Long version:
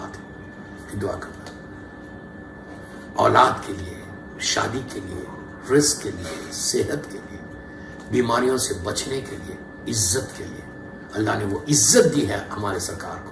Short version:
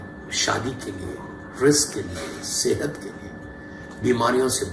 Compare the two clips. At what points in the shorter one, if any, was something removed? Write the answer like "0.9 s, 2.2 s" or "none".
none